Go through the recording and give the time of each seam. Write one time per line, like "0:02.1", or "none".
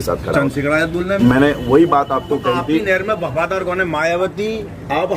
0:01.1